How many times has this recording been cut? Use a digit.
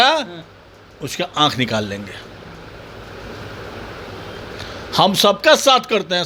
0